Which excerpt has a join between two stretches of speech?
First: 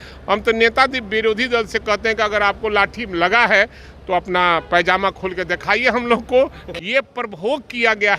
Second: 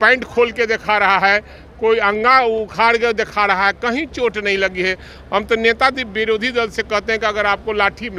first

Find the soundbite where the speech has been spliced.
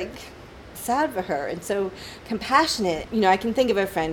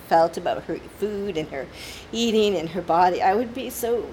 first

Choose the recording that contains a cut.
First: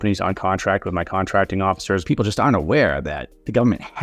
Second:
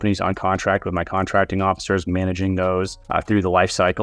first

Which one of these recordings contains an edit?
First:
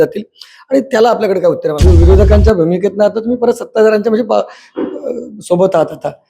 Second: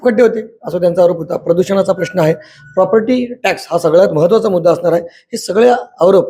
first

